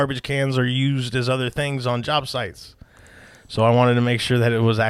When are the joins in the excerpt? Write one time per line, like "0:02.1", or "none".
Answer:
none